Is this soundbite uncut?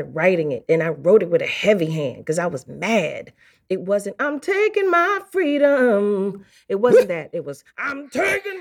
yes; 0 cuts

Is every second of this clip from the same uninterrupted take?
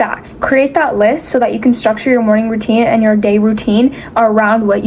yes; 0 cuts

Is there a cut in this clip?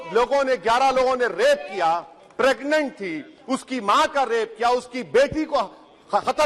no; 0 cuts

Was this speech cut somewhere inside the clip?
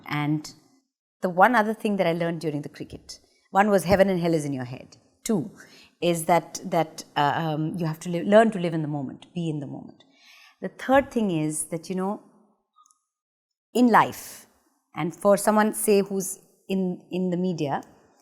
no; 0 cuts

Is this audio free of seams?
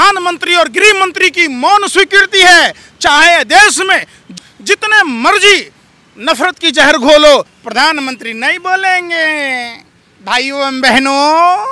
no; 1 cut; at 7.6 s

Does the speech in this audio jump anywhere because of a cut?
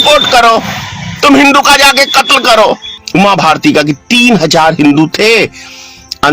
yes; 1 cut; at 2.9 s

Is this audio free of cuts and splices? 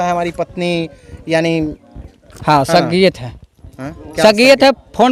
yes; 0 cuts

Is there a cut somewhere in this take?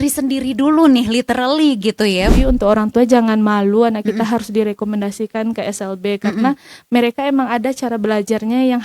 yes; 1 cut; at 2.3 s

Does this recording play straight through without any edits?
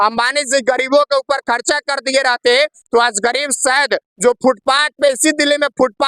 yes; 0 cuts

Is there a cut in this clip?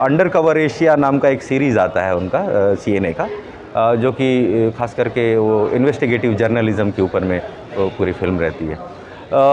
no; 0 cuts

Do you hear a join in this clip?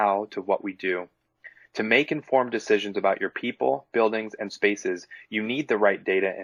no; 0 cuts

